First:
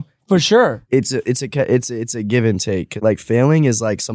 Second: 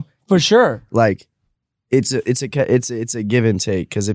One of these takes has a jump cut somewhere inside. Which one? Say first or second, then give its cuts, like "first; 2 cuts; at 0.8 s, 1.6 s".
first; 2 cuts; at 0.8 s, 3.0 s